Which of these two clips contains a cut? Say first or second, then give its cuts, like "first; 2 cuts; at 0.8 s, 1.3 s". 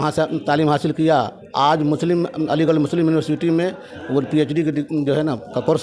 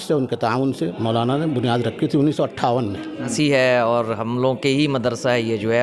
second; 1 cut; at 3.3 s